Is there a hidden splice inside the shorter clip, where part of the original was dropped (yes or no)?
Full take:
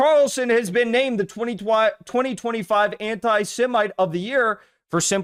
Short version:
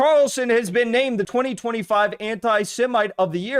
yes